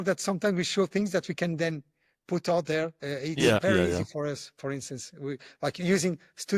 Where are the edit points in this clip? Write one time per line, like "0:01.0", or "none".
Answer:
none